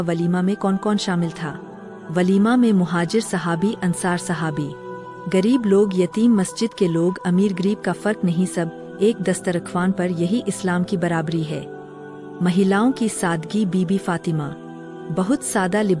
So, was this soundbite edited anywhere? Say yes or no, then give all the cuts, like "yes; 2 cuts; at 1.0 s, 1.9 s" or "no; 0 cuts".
no; 0 cuts